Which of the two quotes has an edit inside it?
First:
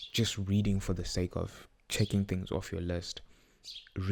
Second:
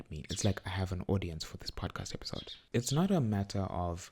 second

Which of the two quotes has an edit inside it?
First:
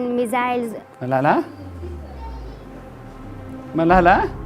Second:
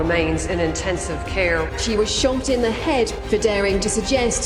first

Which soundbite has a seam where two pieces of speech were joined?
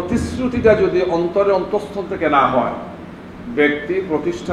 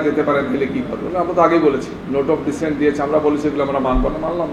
second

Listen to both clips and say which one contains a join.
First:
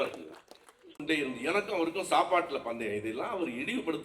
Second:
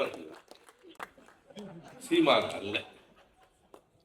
first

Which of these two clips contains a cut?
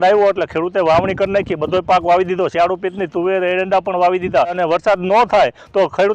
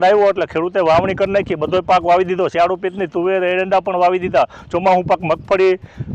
first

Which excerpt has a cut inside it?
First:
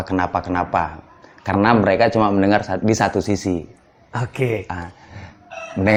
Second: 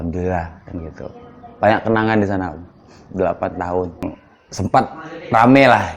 second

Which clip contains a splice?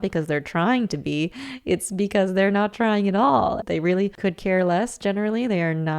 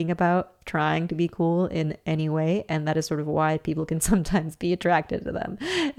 first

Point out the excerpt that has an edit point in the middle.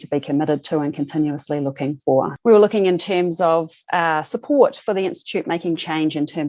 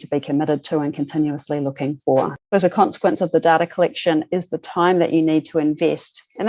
second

